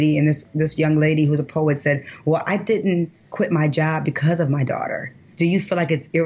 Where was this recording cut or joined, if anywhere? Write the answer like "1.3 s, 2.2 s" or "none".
5.2 s